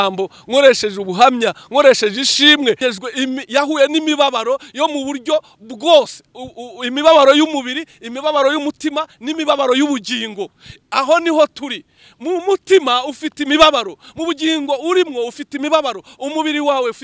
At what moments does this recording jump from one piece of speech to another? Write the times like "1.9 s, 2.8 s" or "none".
2.8 s